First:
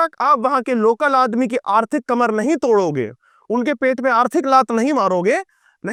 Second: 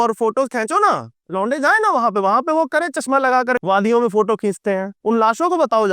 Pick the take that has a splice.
second; 2 cuts; at 3.6 s, 4.9 s

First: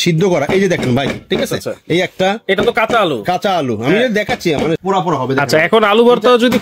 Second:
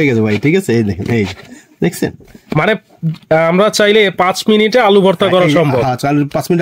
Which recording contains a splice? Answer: first; 1 cut; at 4.8 s

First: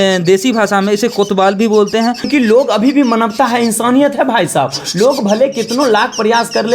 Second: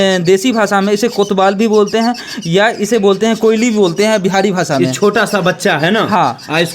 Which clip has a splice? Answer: first; 1 cut; at 2.3 s

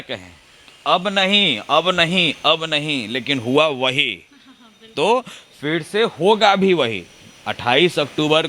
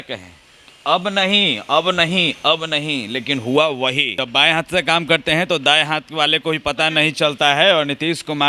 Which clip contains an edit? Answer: second; 1 cut; at 4.2 s

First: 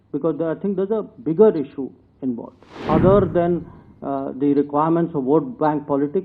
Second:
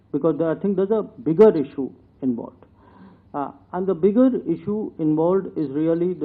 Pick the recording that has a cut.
first; 1 cut; at 2.8 s

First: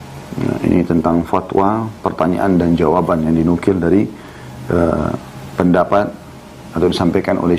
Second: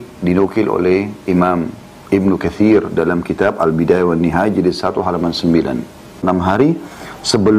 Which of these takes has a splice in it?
second; 1 cut; at 6.2 s

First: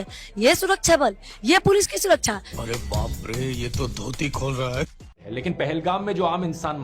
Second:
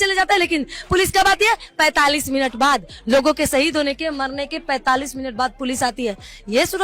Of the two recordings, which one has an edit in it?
first; 2 cuts; at 2.5 s, 5.1 s

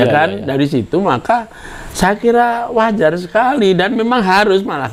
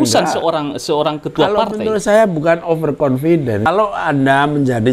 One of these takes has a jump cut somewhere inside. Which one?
second; 1 cut; at 3.7 s

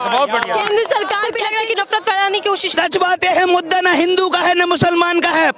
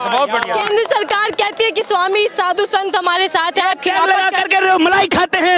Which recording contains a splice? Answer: first; 1 cut; at 1.4 s

